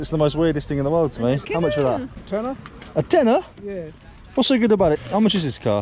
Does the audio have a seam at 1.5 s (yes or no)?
yes